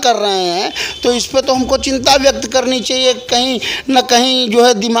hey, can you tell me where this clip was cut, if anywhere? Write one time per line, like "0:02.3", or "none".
none